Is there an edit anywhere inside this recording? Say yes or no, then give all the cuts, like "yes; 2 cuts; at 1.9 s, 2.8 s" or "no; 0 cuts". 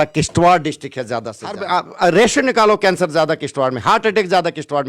yes; 1 cut; at 1.6 s